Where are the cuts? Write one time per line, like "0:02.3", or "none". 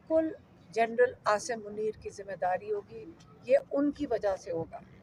none